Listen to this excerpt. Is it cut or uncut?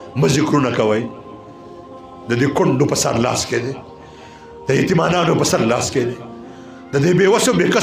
uncut